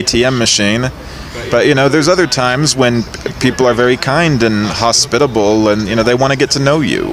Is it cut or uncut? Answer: uncut